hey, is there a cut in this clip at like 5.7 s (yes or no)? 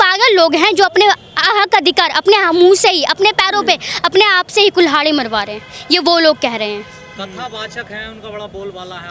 no